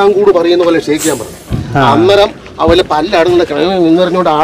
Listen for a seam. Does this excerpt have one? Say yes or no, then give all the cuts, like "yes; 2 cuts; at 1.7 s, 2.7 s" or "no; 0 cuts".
no; 0 cuts